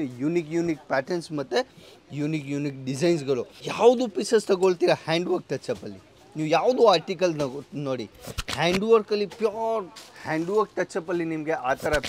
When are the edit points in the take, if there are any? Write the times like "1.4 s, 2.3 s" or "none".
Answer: 3.6 s